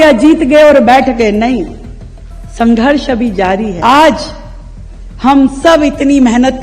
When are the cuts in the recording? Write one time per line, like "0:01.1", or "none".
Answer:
0:03.8